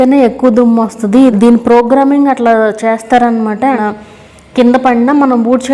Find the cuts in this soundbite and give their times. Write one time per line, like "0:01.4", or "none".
0:01.3
0:03.8